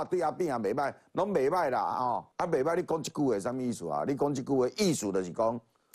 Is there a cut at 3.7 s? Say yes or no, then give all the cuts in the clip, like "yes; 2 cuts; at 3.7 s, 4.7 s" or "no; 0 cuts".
no; 1 cut; at 2.3 s